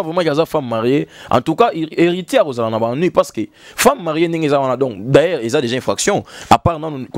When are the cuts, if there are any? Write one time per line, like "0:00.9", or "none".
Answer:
none